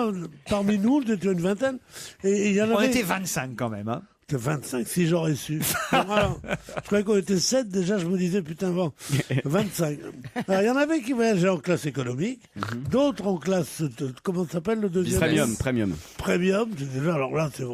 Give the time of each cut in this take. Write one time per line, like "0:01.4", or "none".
0:03.6